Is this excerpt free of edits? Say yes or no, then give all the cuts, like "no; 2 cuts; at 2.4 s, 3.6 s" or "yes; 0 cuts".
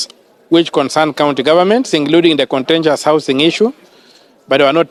yes; 0 cuts